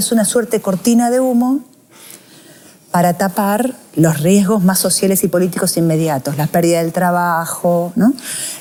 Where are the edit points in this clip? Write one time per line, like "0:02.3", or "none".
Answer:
none